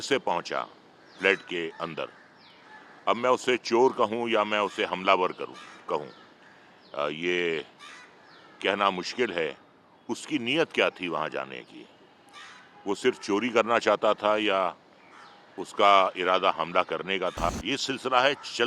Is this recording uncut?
no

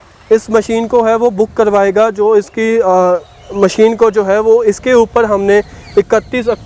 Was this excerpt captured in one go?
yes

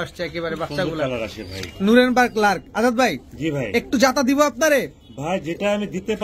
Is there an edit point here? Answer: no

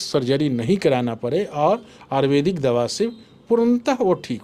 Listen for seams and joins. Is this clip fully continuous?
yes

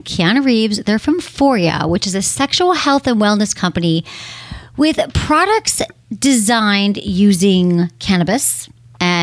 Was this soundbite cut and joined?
no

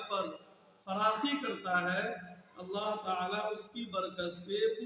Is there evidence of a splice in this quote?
no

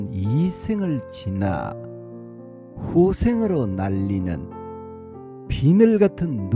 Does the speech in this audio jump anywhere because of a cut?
yes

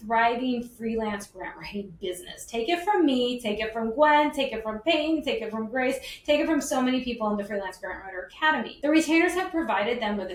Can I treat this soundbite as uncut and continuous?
yes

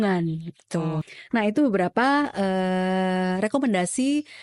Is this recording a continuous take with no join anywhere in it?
no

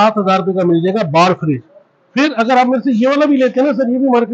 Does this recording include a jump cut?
no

